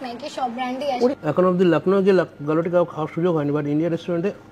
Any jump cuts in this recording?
yes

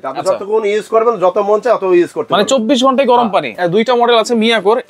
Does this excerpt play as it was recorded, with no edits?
no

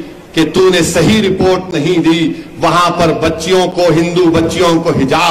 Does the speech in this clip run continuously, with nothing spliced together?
yes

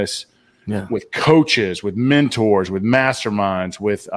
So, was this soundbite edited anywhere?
no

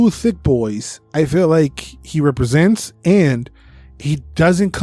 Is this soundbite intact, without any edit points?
yes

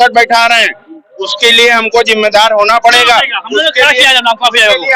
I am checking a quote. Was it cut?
no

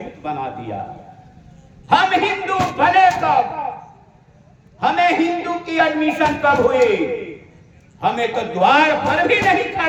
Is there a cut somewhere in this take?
no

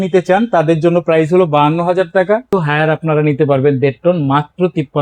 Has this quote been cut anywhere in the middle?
yes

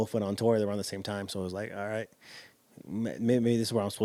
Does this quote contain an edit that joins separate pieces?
no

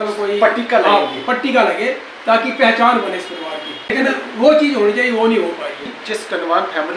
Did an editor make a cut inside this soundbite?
yes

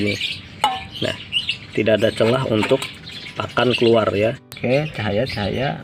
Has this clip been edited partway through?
yes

